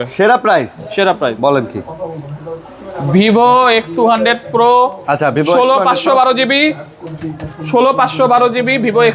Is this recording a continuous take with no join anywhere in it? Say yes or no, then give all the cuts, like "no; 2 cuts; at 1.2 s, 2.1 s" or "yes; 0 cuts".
yes; 0 cuts